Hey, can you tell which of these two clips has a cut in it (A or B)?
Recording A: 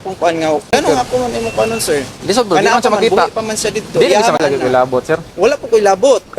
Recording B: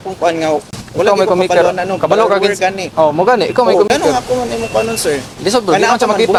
A